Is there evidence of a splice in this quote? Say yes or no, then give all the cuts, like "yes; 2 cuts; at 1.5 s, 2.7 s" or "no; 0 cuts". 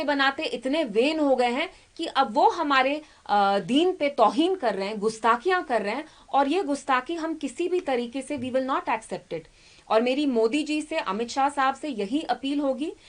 no; 0 cuts